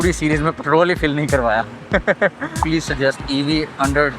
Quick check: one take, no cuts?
no; 1 cut; at 2.6 s

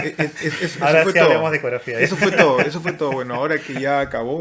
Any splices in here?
no; 0 cuts

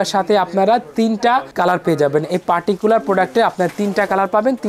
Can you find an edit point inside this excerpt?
no; 0 cuts

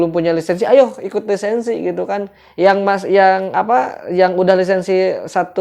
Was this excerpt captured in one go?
yes; 0 cuts

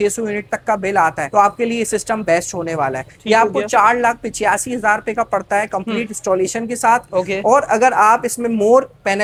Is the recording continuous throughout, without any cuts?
yes; 0 cuts

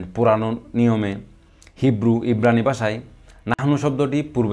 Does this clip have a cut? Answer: no; 0 cuts

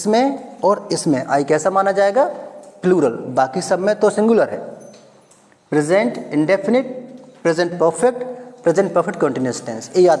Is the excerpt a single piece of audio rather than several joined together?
yes; 0 cuts

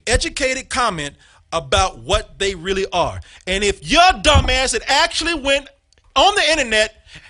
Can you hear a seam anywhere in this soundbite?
no; 0 cuts

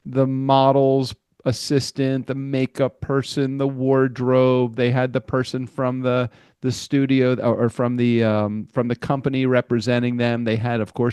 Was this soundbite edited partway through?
no; 0 cuts

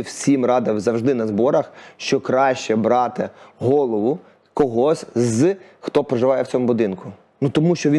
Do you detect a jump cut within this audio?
no; 0 cuts

